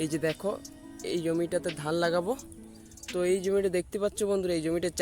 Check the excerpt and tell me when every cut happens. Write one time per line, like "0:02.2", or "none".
none